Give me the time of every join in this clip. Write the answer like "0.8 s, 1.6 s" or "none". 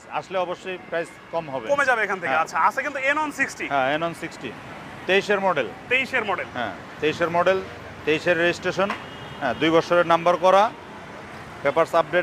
none